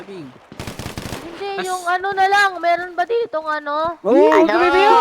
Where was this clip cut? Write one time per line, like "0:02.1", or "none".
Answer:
0:04.1